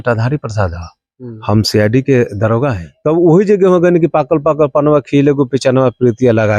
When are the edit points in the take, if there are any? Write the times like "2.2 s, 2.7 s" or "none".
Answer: 2.9 s